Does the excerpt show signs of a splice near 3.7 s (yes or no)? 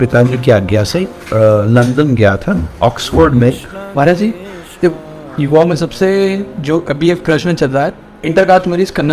yes